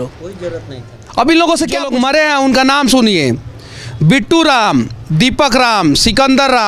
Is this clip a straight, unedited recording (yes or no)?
no